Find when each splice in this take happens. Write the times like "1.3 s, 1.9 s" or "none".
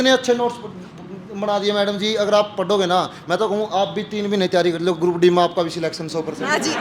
none

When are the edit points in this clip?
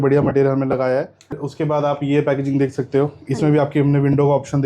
1.4 s

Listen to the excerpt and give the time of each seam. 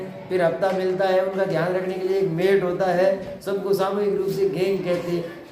none

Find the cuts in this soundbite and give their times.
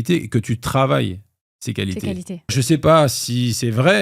2.5 s

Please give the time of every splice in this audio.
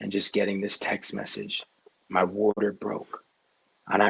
2.6 s

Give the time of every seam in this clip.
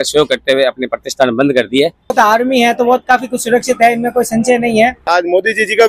2.1 s, 5.1 s

